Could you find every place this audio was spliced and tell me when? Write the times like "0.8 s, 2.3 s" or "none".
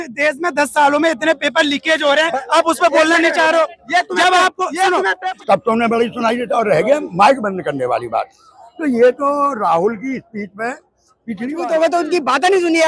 5.2 s, 11.5 s

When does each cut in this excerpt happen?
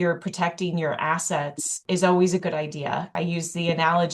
1.7 s, 3.2 s

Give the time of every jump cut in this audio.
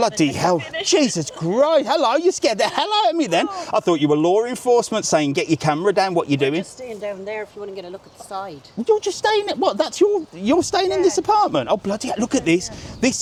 none

